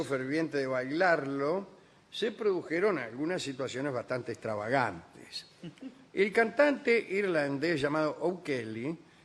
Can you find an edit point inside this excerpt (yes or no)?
yes